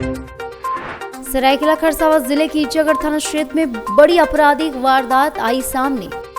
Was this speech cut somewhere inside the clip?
yes; 1 cut; at 1.2 s

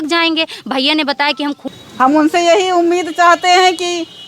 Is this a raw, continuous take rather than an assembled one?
no; 1 cut; at 1.6 s

